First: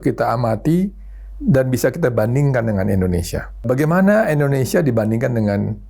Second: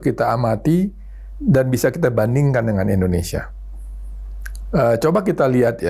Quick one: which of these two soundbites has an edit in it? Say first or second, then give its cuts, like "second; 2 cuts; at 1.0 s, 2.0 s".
first; 1 cut; at 3.7 s